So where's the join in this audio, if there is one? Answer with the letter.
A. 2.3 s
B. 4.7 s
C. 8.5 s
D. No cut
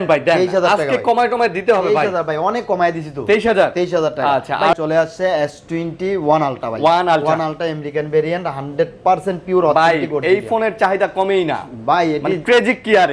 B